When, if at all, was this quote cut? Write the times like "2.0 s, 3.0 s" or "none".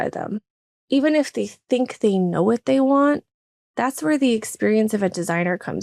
none